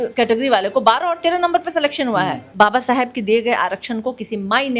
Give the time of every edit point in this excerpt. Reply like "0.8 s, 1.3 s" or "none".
2.4 s